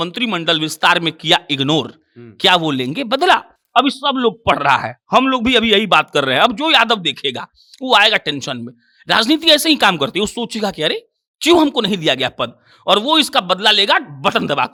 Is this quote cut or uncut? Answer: uncut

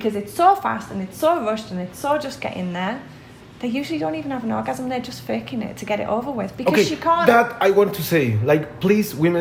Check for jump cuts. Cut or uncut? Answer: uncut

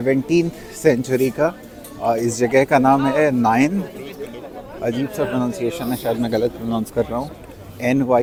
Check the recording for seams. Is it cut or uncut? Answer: uncut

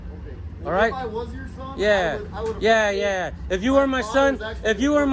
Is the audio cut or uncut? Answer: uncut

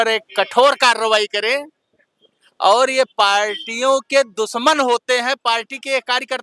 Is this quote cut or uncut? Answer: uncut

